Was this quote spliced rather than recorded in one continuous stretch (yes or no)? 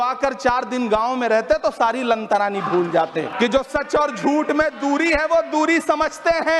yes